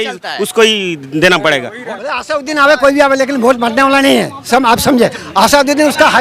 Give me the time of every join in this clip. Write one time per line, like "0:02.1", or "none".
0:02.0